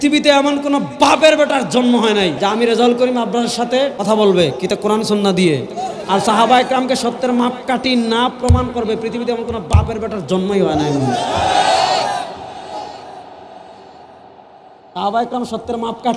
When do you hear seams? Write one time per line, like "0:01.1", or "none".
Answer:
0:02.3
0:04.0